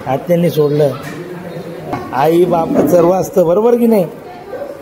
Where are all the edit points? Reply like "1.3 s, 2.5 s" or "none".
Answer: 2.0 s